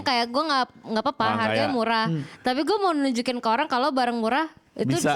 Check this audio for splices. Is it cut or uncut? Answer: uncut